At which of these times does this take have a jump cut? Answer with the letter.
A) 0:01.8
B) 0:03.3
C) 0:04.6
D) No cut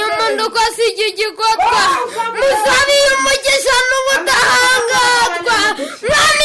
D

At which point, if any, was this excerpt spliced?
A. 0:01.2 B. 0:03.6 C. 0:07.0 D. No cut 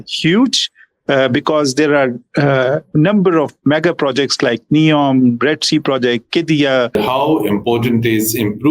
C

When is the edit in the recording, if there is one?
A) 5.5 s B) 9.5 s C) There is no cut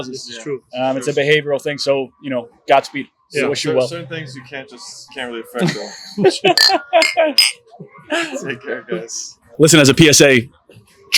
B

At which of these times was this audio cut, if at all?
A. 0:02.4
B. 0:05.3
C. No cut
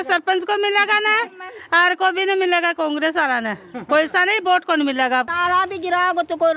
B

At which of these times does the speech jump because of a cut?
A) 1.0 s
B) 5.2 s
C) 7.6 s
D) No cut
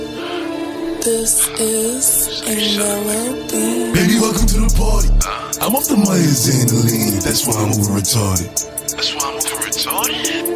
A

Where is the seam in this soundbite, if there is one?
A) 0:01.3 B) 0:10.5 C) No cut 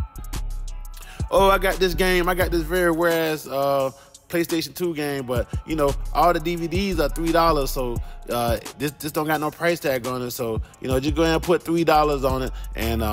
A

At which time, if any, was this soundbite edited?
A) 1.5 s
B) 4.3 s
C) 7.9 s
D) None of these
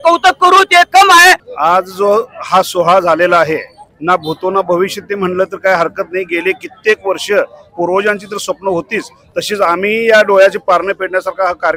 A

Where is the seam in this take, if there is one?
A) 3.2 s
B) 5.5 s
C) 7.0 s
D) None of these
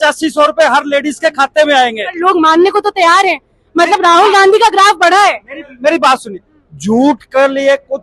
D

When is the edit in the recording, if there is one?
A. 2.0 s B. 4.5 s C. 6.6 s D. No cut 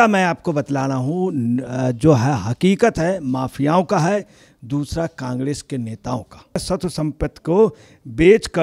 C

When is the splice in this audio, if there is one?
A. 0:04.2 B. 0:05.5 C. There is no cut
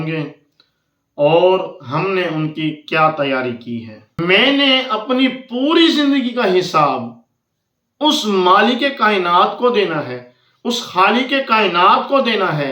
A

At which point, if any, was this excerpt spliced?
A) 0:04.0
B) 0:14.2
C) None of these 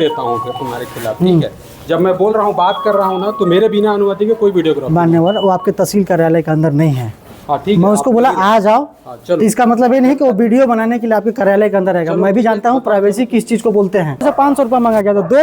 B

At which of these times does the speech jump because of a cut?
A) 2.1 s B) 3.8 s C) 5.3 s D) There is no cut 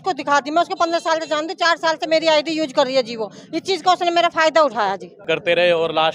C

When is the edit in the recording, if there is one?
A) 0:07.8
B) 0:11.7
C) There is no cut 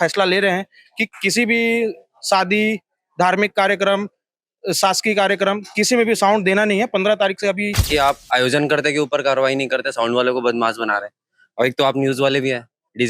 A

